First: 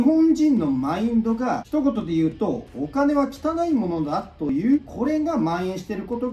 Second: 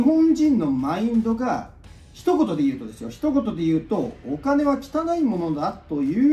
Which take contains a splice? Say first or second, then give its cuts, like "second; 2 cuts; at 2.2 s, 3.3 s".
first; 2 cuts; at 1.6 s, 4.5 s